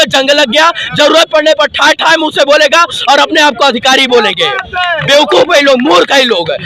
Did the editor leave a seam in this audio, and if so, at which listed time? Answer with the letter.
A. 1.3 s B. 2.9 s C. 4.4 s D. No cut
D